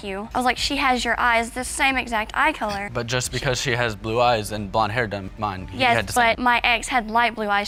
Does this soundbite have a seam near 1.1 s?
no; 0 cuts

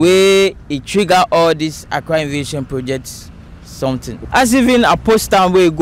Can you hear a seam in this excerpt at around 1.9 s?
no; 1 cut; at 4.2 s

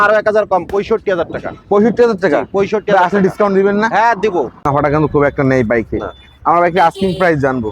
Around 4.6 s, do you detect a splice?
yes; 1 cut; at 4.6 s

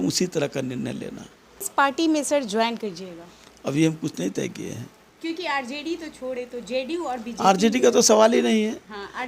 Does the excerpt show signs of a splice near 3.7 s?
no; 1 cut; at 1.7 s

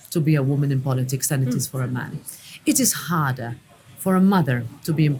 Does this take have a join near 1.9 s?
no; 0 cuts

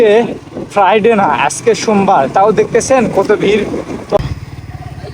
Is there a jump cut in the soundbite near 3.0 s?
no; 1 cut; at 4.2 s

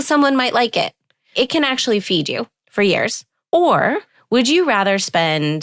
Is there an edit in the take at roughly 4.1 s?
yes; 4 cuts; at 1.3 s, 2.6 s, 3.3 s, 4.1 s

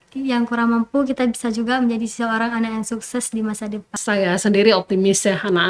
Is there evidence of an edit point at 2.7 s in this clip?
no; 1 cut; at 4.0 s

